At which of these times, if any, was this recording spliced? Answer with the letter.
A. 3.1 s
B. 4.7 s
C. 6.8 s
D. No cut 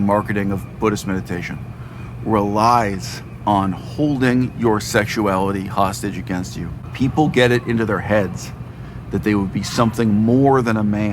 C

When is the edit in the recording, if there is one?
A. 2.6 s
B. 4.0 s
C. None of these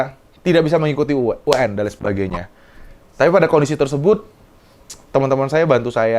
C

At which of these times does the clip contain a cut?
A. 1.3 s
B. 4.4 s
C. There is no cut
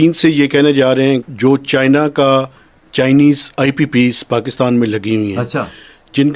A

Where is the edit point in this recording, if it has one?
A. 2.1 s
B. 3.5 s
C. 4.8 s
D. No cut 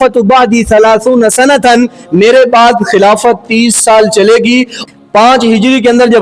C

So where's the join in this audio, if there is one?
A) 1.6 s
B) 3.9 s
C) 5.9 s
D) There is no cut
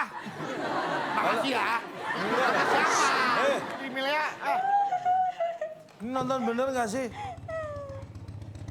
B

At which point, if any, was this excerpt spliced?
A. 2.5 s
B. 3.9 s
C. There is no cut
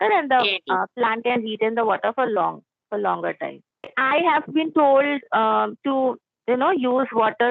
B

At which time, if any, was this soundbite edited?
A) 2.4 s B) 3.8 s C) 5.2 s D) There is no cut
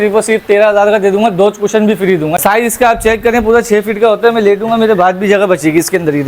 A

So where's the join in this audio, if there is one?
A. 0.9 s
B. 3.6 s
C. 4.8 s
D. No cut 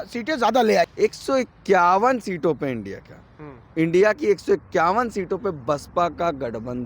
A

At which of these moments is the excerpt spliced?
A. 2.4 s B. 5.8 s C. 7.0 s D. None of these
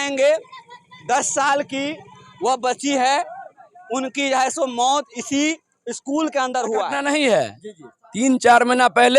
C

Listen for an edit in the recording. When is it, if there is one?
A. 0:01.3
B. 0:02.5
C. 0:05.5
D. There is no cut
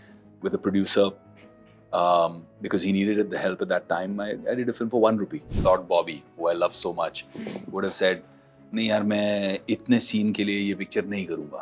C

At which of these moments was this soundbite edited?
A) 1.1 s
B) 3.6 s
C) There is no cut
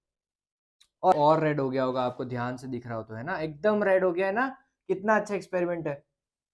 A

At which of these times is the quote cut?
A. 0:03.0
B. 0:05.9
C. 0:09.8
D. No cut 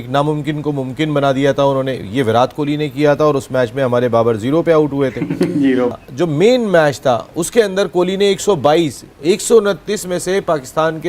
B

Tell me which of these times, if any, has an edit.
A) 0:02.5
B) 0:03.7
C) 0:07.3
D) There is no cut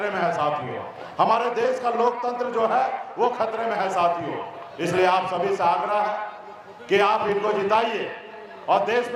D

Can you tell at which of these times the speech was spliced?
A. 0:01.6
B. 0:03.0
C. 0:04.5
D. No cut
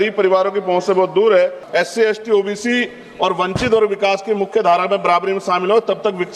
A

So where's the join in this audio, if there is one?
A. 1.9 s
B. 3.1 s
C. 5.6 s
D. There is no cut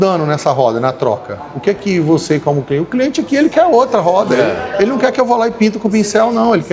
D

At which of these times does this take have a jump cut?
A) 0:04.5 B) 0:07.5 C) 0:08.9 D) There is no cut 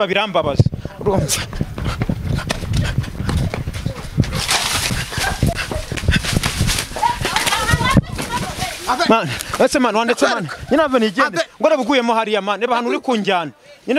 D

